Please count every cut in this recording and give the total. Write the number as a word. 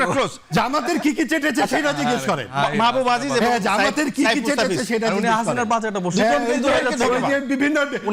zero